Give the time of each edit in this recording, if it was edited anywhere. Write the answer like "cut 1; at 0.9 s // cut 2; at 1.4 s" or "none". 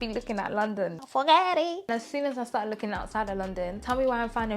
cut 1; at 1.9 s